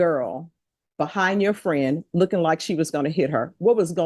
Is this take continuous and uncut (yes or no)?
yes